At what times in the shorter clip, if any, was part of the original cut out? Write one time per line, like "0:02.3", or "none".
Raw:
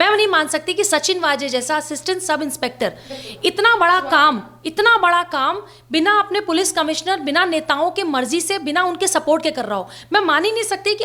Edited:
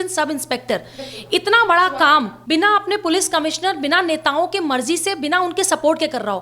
0:02.4